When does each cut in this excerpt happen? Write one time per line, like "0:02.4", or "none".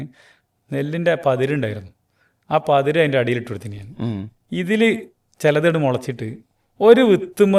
none